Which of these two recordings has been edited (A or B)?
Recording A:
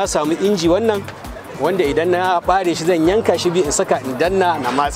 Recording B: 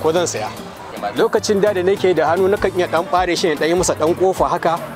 B